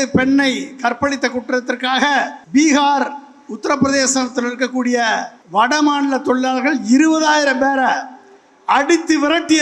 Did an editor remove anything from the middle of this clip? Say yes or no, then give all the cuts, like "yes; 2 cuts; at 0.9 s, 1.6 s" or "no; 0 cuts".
yes; 2 cuts; at 2.4 s, 5.4 s